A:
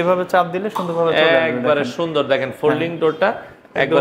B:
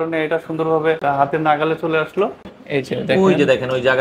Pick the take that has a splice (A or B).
B